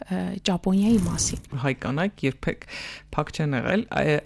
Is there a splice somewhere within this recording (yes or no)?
yes